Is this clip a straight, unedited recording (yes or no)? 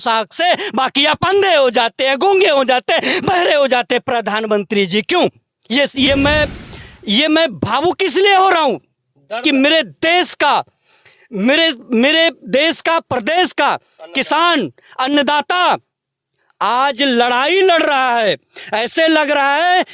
no